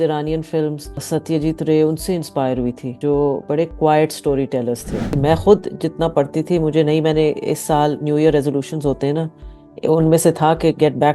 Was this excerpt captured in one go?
no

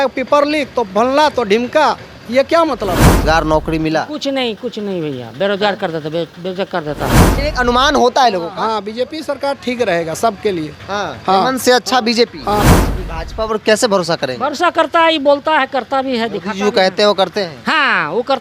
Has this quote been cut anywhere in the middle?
yes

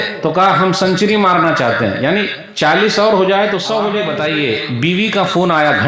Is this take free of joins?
no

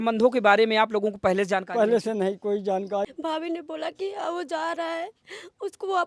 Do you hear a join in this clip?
yes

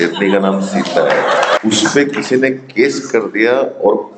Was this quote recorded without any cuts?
no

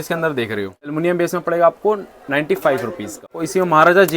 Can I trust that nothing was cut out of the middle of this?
no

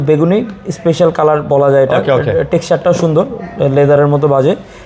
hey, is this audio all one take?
yes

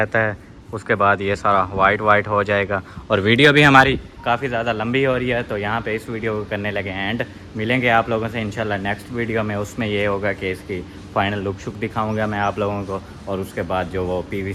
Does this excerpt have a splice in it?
no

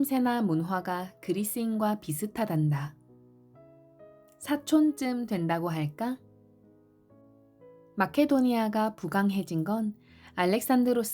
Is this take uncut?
no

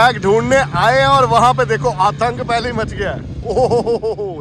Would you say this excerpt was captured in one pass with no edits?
yes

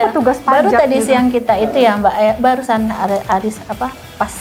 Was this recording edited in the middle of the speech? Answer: no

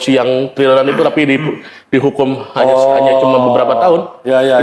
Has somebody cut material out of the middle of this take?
no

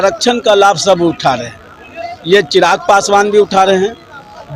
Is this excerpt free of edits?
yes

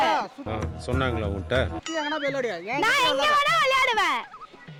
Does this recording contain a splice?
no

